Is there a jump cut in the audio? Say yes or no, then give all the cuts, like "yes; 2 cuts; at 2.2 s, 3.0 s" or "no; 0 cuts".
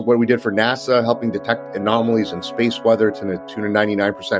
no; 0 cuts